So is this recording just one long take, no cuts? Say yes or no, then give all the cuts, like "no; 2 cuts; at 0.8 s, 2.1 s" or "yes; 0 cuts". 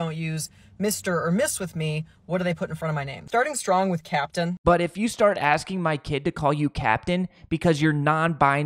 no; 2 cuts; at 3.2 s, 4.5 s